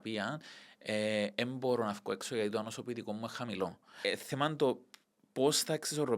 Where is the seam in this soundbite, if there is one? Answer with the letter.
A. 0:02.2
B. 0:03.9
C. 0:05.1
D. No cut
B